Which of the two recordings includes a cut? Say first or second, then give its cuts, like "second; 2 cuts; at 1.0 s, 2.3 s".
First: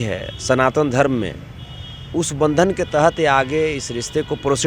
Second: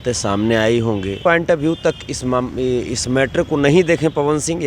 second; 1 cut; at 1.2 s